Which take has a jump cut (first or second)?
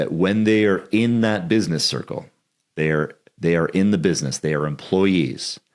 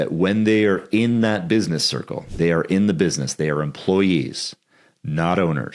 second